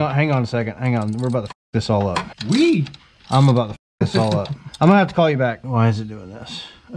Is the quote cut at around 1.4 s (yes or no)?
no